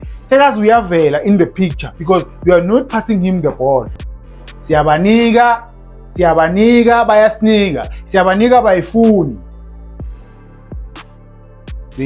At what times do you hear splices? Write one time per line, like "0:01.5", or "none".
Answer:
0:04.0